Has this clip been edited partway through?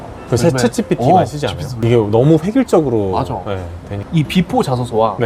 yes; 2 cuts; at 1.7 s, 4.0 s

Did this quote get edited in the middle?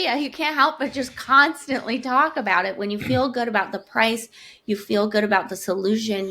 no; 0 cuts

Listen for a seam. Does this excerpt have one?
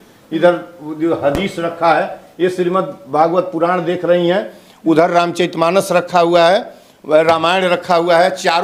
no; 0 cuts

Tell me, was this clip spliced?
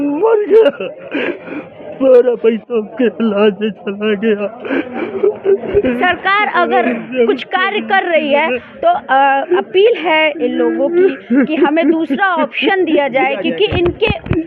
no; 0 cuts

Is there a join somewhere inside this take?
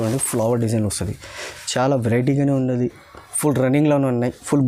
no; 0 cuts

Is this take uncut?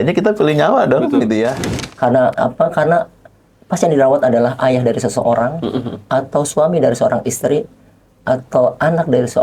no; 1 cut; at 1.7 s

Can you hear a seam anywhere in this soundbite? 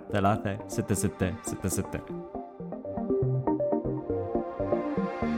yes; 1 cut; at 1.9 s

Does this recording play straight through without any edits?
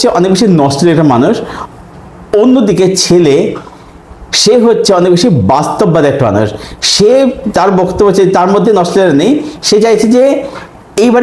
yes; 0 cuts

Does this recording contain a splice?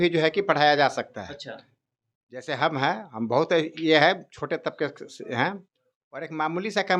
no; 0 cuts

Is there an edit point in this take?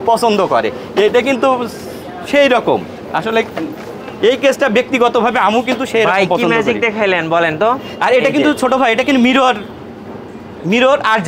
no; 0 cuts

